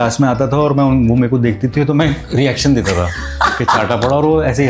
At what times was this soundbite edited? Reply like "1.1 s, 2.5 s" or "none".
none